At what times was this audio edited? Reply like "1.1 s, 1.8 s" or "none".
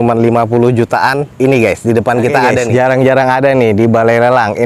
2.7 s